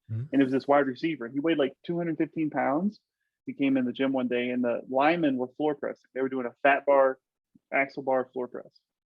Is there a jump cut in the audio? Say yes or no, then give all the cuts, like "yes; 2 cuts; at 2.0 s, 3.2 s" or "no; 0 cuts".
yes; 2 cuts; at 1.8 s, 3.4 s